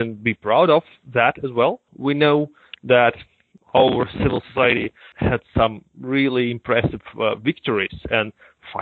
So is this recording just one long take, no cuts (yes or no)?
yes